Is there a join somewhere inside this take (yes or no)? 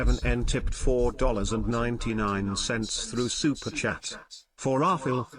no